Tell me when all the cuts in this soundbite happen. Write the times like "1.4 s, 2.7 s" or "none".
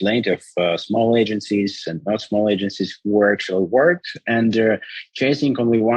4.1 s

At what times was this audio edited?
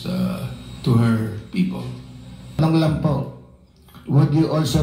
2.6 s

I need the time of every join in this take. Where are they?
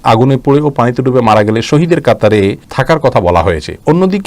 2.7 s

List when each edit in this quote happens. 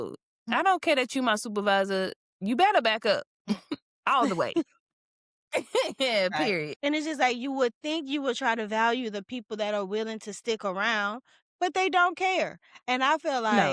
6.7 s

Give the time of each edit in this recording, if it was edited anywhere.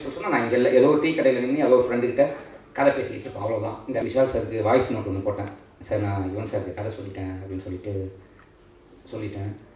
4.0 s

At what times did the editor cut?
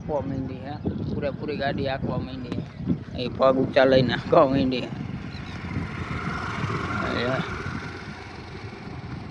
none

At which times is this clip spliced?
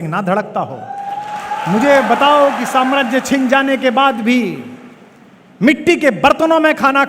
1.6 s

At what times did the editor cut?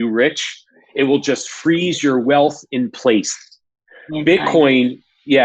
none

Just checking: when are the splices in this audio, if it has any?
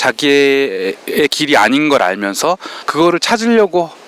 2.8 s

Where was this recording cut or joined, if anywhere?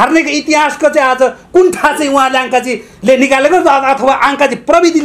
none

